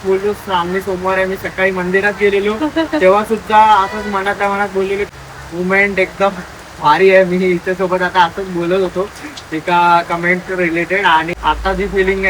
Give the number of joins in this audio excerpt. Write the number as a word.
two